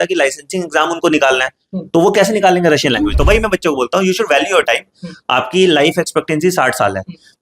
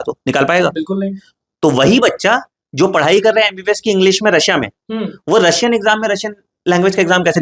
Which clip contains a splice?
first; 1 cut; at 3.1 s

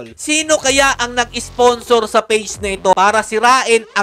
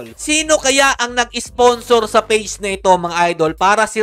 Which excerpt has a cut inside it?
first; 1 cut; at 2.9 s

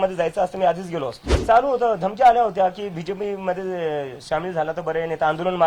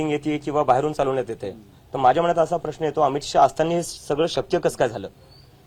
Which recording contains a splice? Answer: first; 1 cut; at 1.3 s

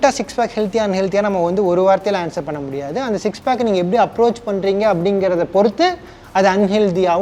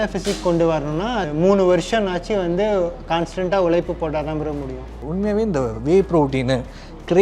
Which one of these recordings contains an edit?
second; 2 cuts; at 1.3 s, 5.0 s

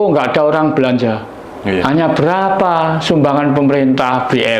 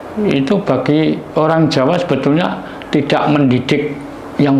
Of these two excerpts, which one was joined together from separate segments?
first; 1 cut; at 1.8 s

